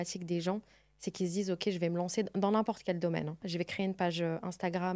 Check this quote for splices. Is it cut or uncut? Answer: cut